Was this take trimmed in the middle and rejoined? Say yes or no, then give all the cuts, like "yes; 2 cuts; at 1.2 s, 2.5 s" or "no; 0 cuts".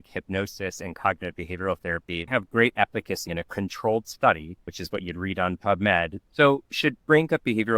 yes; 4 cuts; at 2.3 s, 3.3 s, 4.8 s, 6.2 s